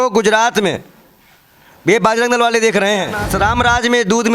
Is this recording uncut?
no; 1 cut; at 3.2 s

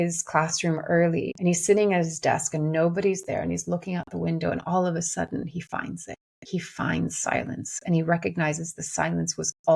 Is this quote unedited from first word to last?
no; 1 cut; at 1.3 s

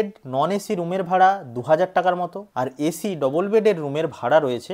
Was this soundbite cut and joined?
no; 0 cuts

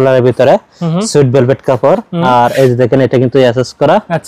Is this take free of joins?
yes; 0 cuts

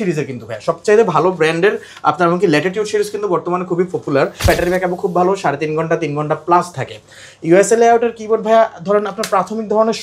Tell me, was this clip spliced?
yes; 1 cut; at 4.5 s

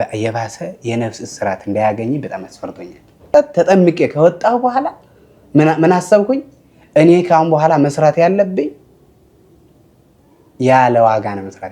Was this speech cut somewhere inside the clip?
yes; 1 cut; at 3.3 s

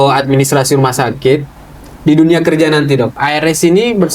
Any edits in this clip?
yes; 1 cut; at 3.2 s

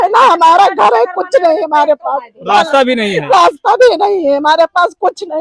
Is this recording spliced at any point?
no; 0 cuts

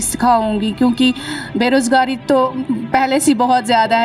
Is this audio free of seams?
yes; 0 cuts

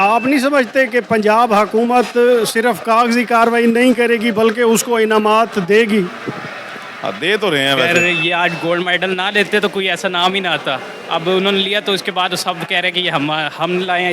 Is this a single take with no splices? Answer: no; 1 cut; at 7.9 s

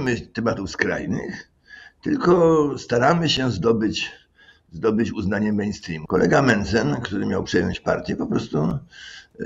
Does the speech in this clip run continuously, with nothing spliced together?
no; 1 cut; at 5.9 s

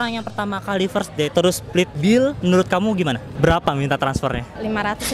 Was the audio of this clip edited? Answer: yes; 1 cut; at 3.3 s

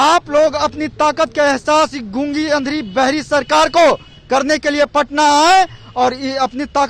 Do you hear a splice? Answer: no; 0 cuts

